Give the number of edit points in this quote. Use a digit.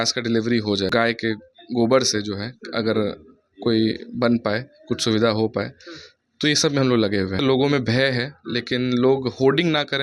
2